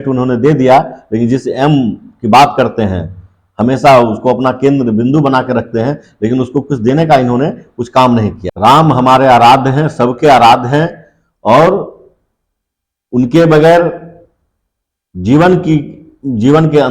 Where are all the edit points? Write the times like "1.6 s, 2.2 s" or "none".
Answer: 8.4 s